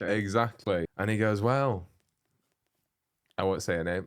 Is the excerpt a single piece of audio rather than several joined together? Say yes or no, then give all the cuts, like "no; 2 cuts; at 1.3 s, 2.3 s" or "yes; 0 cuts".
no; 1 cut; at 0.9 s